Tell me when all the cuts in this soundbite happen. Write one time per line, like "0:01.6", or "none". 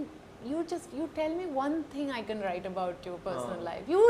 none